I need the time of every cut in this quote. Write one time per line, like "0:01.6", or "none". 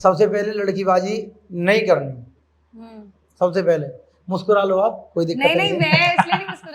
none